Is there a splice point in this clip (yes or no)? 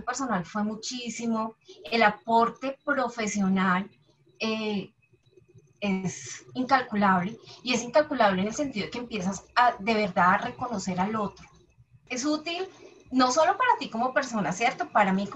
yes